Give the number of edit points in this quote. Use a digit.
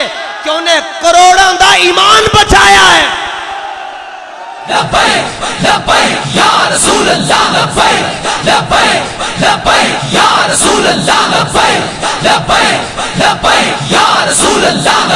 0